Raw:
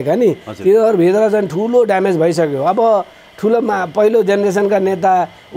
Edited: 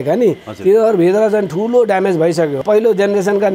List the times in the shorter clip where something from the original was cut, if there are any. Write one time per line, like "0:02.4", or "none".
0:02.6